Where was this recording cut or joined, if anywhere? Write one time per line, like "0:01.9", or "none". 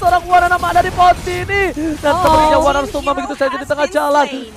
none